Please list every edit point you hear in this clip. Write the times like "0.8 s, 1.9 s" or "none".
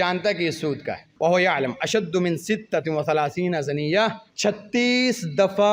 1.0 s, 4.3 s